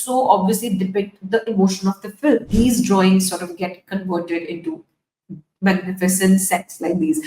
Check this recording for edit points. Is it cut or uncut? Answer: cut